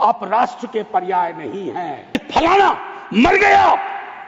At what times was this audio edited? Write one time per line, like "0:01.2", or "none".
0:02.2